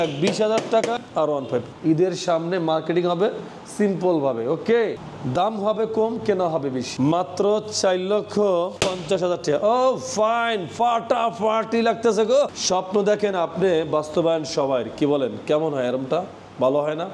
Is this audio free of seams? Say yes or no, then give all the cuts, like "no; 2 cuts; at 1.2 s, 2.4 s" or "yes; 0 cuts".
no; 3 cuts; at 1.7 s, 6.9 s, 12.5 s